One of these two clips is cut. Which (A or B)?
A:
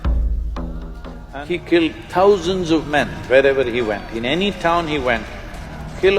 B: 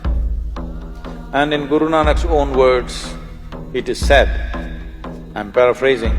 A